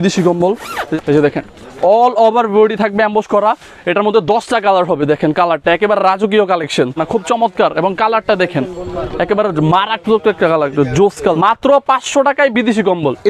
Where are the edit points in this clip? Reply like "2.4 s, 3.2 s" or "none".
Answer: 0.9 s, 7.0 s, 11.3 s